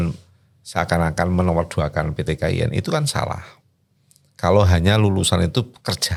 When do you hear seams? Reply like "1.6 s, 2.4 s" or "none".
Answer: none